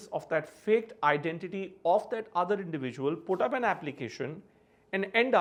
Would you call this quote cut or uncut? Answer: uncut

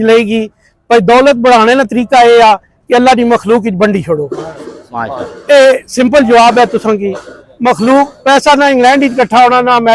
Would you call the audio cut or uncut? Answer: uncut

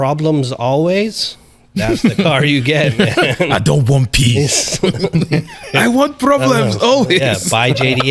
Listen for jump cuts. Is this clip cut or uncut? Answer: uncut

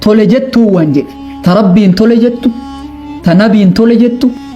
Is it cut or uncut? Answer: uncut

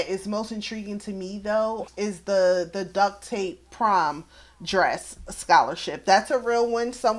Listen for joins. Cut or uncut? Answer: uncut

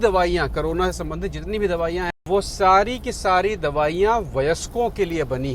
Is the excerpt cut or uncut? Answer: cut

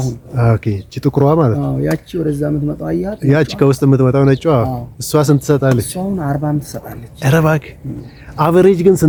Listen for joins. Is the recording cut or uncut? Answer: uncut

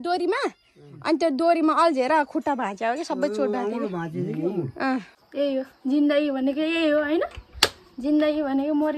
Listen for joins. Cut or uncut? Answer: cut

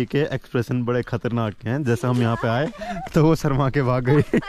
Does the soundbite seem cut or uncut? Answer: uncut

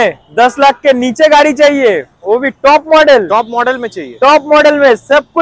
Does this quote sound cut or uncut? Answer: uncut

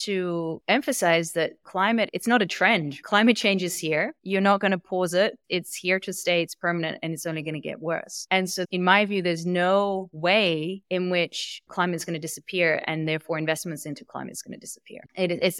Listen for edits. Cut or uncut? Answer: cut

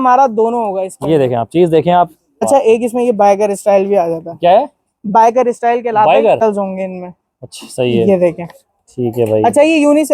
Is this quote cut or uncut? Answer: cut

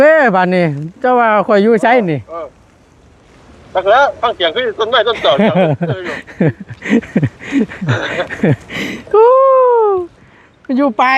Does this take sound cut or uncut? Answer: uncut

